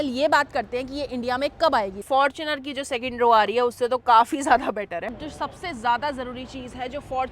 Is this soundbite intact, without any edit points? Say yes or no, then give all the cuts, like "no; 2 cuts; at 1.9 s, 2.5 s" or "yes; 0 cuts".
no; 2 cuts; at 2.0 s, 5.2 s